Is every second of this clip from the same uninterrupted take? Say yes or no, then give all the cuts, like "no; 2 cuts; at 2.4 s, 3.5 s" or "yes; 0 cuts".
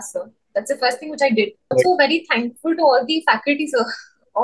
no; 1 cut; at 1.7 s